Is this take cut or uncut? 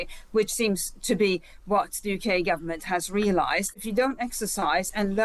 cut